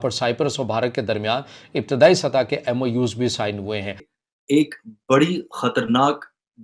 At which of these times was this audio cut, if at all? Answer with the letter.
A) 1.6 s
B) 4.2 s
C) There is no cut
B